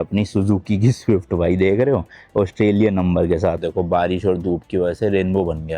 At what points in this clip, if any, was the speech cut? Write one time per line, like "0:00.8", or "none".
0:03.7